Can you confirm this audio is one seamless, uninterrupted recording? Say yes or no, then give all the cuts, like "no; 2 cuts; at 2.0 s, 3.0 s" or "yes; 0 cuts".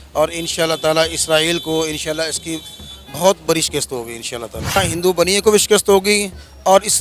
no; 1 cut; at 4.8 s